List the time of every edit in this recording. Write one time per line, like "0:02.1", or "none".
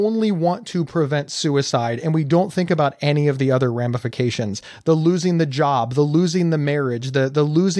none